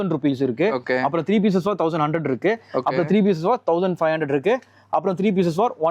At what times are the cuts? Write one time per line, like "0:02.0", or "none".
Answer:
none